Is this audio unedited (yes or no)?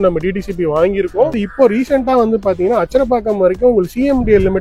no